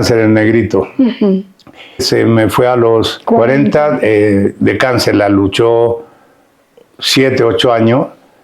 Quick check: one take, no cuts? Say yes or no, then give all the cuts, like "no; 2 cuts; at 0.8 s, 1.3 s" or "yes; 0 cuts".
no; 2 cuts; at 2.0 s, 3.2 s